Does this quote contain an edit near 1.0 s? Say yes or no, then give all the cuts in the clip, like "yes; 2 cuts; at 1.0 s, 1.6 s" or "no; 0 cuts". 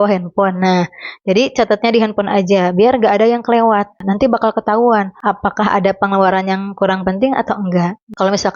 no; 1 cut; at 4.0 s